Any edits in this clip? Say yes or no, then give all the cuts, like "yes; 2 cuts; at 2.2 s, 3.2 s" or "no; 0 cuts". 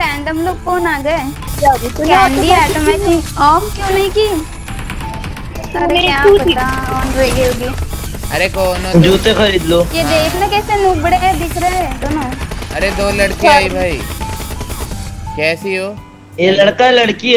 no; 0 cuts